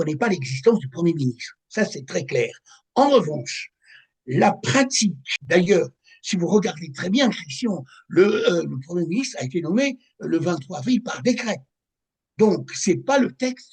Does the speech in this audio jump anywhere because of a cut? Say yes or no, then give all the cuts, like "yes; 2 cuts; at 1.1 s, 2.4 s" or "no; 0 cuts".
yes; 1 cut; at 5.3 s